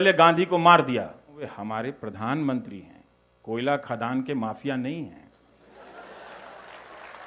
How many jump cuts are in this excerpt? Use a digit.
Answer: 1